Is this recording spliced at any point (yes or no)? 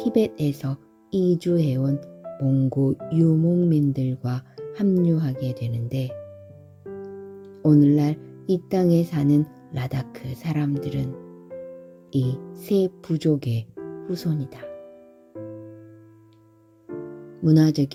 no